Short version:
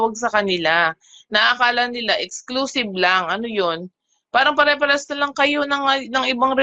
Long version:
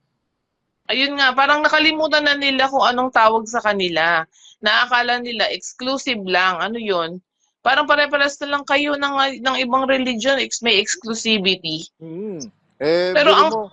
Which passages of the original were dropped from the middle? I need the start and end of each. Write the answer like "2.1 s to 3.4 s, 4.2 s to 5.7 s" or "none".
none